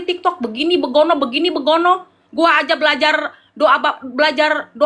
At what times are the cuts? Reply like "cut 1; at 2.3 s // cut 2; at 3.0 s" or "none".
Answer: none

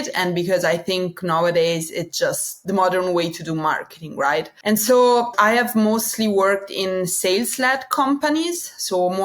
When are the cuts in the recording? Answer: cut 1; at 2.5 s

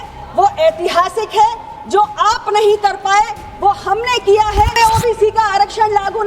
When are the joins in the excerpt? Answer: cut 1; at 4.7 s

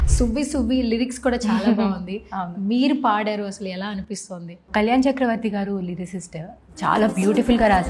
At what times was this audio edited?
none

